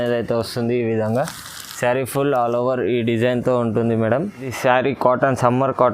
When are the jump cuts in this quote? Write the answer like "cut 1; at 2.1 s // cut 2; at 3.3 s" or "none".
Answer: cut 1; at 4.5 s